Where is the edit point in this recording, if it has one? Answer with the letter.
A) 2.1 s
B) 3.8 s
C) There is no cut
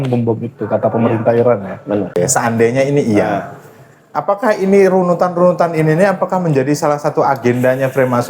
A